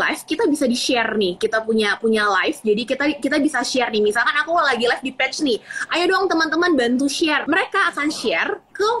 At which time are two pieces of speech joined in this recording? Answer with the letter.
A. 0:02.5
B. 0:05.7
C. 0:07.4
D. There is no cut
C